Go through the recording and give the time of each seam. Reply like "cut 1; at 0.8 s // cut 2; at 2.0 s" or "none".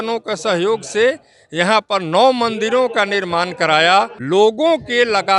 cut 1; at 4.2 s